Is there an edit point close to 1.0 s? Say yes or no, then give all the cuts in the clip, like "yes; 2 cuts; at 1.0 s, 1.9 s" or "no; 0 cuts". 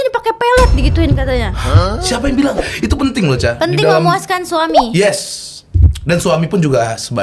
no; 1 cut; at 2.7 s